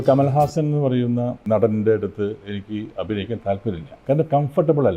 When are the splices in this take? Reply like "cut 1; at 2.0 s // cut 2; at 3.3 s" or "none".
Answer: cut 1; at 1.4 s // cut 2; at 4.0 s